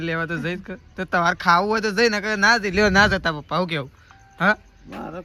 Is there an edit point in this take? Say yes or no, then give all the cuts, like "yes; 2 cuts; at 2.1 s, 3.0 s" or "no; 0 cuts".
no; 0 cuts